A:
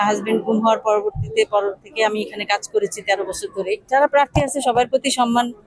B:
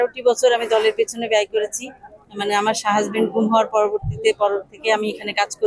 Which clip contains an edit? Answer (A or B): A